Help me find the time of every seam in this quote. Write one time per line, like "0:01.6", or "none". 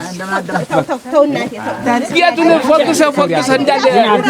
0:01.8